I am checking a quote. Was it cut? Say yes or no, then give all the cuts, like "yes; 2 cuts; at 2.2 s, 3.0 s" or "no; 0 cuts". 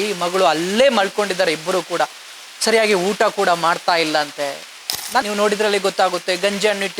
yes; 1 cut; at 5.2 s